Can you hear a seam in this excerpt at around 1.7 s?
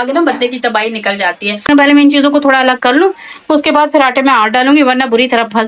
yes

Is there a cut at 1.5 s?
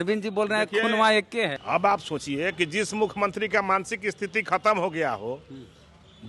yes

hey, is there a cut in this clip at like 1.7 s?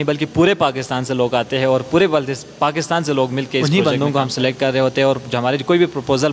no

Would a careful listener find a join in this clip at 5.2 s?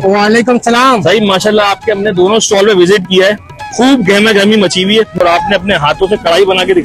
yes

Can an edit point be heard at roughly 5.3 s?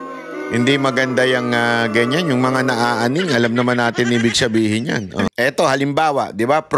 yes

